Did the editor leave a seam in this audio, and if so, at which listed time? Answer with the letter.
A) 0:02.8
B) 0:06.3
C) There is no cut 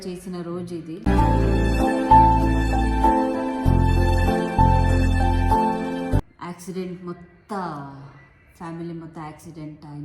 B